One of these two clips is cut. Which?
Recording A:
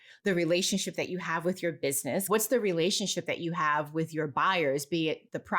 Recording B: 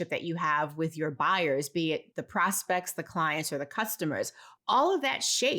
A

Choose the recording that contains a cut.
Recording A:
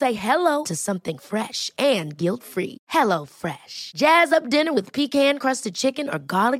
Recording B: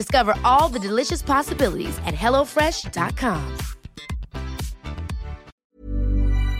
B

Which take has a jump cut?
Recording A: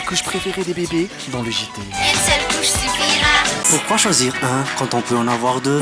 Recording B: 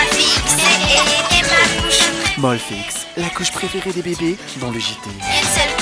A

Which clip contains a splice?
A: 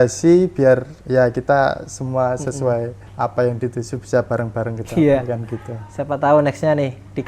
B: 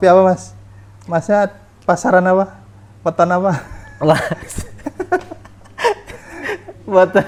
A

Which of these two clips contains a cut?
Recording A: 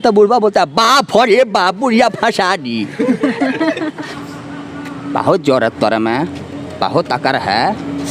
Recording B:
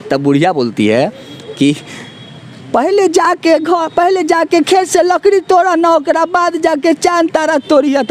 A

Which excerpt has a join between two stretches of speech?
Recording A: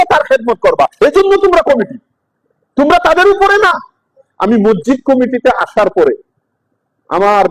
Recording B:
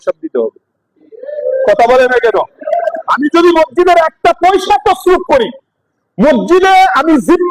A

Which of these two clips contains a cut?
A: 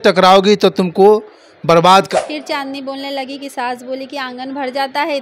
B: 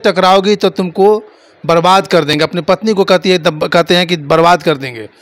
A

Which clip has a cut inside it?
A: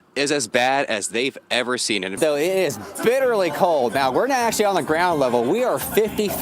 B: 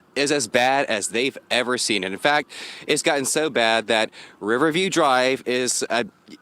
A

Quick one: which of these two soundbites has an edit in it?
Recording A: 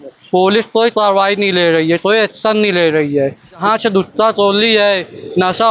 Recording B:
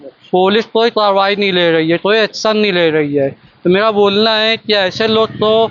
A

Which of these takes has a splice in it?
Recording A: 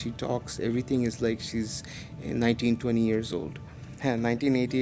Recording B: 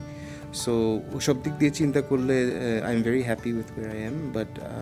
A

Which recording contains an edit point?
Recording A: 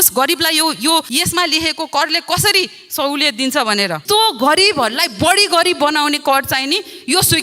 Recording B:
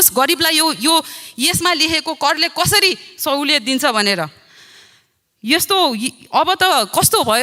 A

